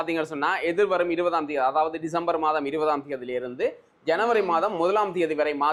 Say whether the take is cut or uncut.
uncut